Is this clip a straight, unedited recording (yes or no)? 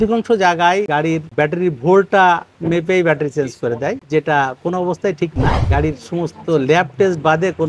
yes